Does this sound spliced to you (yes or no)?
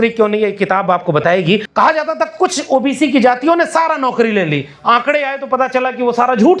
yes